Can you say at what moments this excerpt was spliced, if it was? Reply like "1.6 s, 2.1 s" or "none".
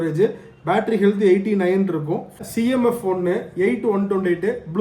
2.4 s